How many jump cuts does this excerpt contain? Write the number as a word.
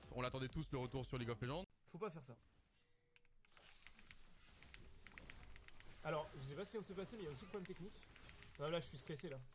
one